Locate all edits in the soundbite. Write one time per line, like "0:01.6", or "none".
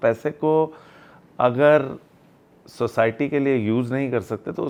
none